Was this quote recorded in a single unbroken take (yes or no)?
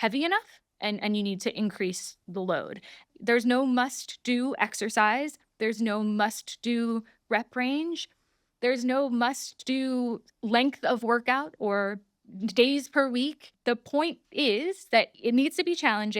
no